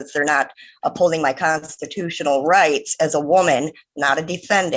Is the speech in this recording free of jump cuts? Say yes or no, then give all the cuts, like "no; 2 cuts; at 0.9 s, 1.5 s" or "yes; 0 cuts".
yes; 0 cuts